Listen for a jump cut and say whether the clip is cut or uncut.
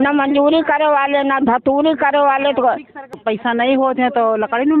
cut